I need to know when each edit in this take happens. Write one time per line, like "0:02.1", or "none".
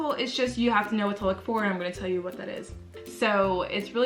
0:02.9